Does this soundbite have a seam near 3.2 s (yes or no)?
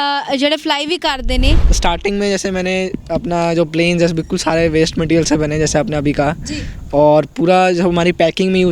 no